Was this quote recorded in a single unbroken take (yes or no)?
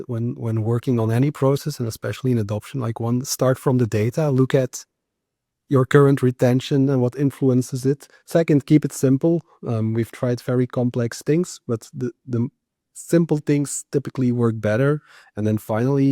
yes